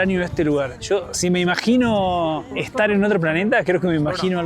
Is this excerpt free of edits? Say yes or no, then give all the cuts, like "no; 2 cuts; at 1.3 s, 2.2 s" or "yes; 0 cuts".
no; 1 cut; at 2.6 s